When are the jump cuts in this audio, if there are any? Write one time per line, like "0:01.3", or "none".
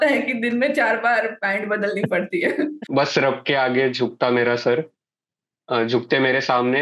0:02.8

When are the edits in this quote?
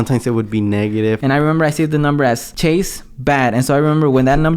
0:01.2
0:02.5

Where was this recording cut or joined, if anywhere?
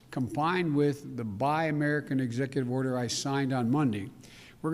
0:01.1

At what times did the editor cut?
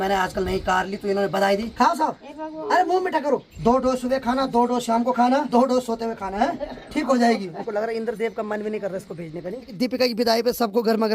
0:01.7
0:03.5
0:05.5
0:07.6
0:09.7

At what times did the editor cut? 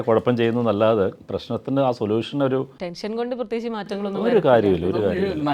0:01.3
0:02.8

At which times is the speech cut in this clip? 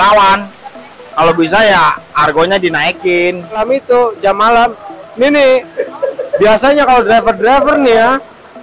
0:03.6

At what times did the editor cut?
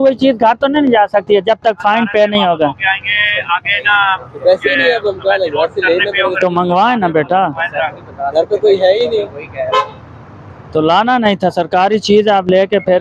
none

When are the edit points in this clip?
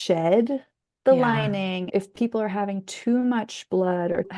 0:01.9

